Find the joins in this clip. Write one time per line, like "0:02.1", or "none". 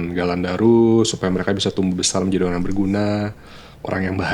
none